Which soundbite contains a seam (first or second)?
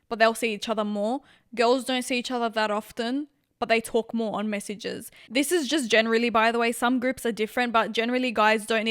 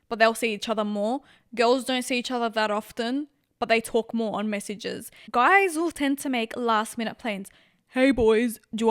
second